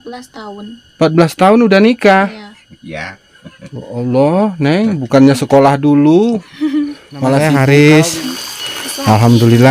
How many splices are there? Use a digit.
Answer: 1